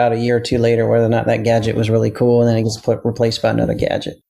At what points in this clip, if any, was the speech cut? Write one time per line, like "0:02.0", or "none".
none

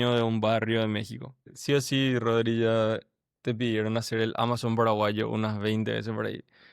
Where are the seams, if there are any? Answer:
0:01.5

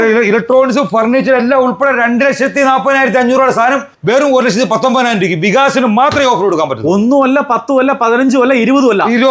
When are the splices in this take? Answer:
none

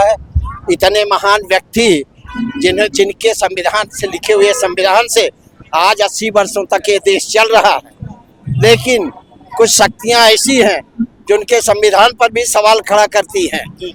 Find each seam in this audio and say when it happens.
none

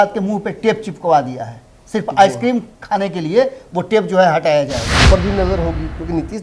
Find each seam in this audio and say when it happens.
0:05.0

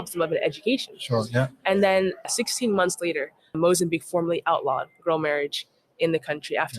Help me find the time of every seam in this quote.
0:02.2
0:03.4

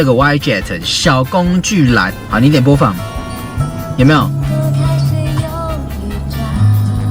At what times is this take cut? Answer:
0:02.1

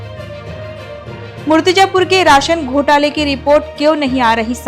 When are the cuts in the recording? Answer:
0:01.0

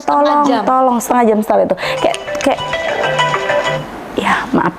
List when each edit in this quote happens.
none

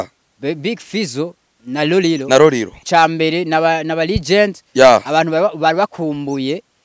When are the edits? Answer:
0:01.5
0:02.8

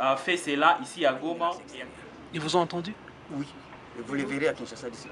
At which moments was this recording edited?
0:01.7

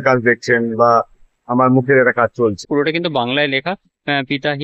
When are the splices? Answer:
0:02.6

